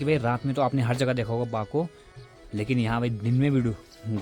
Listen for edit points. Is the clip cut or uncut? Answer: cut